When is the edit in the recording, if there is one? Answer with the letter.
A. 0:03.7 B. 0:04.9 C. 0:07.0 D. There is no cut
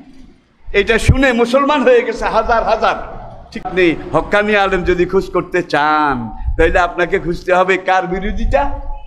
A